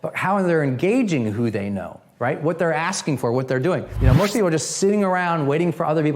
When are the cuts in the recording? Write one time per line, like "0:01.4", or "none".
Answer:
0:03.9